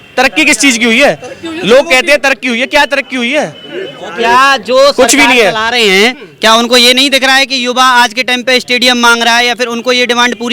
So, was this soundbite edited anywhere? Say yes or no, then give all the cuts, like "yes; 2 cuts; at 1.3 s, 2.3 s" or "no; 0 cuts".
no; 0 cuts